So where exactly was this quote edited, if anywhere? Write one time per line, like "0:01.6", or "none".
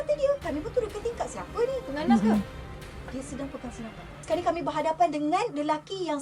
0:04.2

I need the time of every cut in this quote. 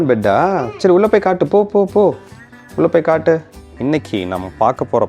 0:03.6

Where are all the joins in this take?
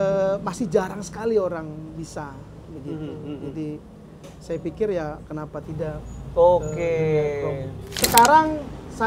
0:08.0

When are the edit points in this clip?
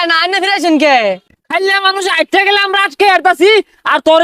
0:01.4

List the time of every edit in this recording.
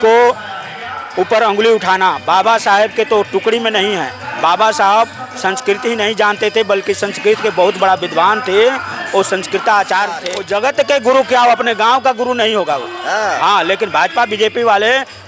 0:10.3

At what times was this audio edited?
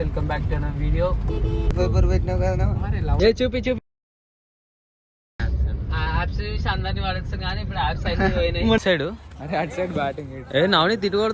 0:01.7
0:03.2
0:08.8

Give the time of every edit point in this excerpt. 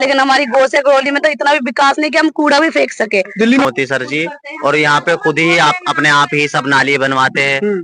0:03.7

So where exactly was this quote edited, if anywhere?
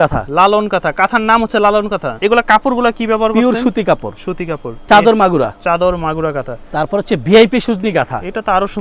0:02.1
0:04.7
0:06.5

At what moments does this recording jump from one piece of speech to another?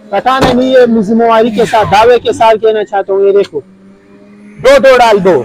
none

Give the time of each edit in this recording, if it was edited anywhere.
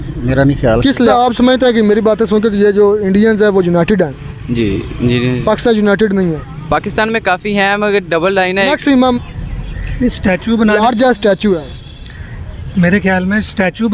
0:01.1
0:09.4

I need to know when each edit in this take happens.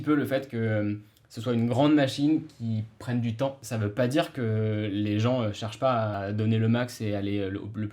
0:03.6
0:06.1

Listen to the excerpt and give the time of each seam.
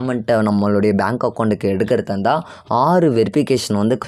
none

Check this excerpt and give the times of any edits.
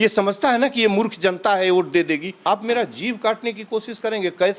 0:02.3

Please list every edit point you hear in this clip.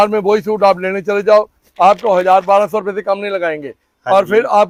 none

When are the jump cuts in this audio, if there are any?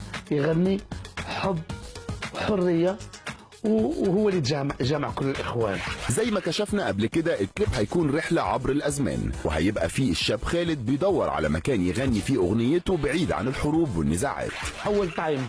0:01.7

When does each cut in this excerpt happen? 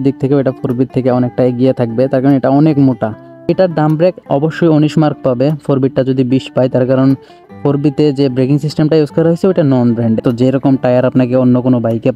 0:03.4
0:10.2

